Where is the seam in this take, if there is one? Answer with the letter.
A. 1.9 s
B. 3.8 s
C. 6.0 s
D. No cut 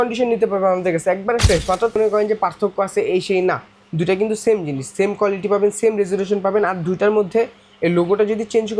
A